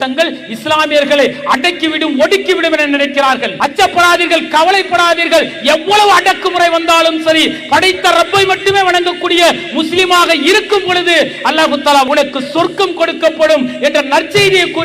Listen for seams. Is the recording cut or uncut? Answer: cut